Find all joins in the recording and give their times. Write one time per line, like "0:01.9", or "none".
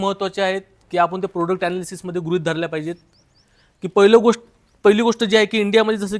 none